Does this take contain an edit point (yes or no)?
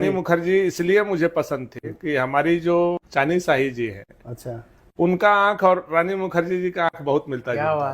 yes